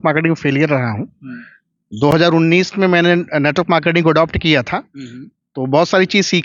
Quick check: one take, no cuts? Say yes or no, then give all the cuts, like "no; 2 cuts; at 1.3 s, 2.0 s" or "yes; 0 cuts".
yes; 0 cuts